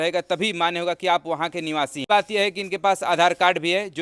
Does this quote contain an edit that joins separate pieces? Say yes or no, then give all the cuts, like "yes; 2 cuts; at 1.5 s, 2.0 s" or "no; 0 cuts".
yes; 1 cut; at 2.0 s